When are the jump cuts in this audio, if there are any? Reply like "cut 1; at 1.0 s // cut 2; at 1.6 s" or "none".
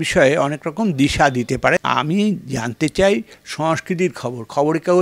cut 1; at 1.8 s